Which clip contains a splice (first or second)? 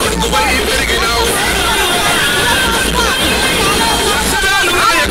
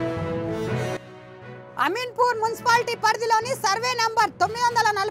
second